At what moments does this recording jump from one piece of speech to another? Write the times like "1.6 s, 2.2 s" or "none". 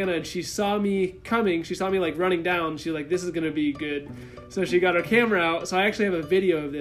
none

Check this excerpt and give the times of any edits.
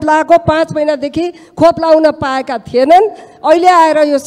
none

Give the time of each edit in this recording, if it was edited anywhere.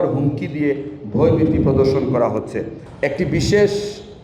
3.0 s

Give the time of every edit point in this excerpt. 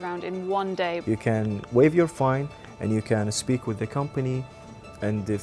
1.0 s

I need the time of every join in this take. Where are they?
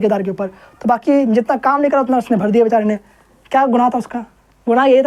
none

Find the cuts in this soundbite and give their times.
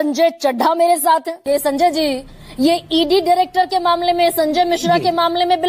1.4 s

